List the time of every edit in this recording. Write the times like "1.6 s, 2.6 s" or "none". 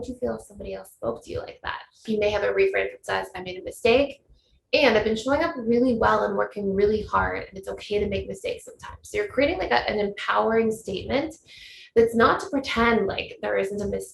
2.0 s